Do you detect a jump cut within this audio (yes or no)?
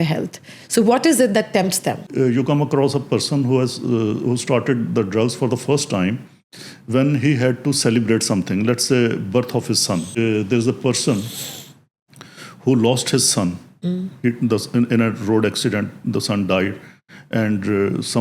yes